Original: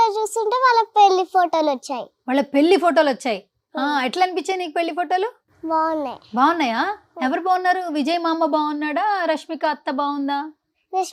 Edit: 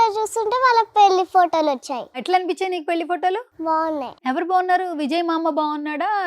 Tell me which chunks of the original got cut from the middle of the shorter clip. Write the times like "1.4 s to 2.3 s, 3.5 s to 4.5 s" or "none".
2.2 s to 4.1 s, 5.7 s to 6.8 s